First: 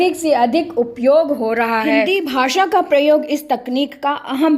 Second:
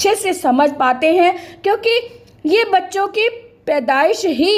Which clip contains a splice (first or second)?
first